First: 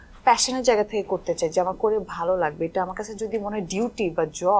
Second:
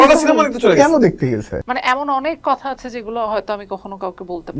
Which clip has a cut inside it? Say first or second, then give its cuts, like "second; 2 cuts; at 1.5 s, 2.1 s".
second; 1 cut; at 1.5 s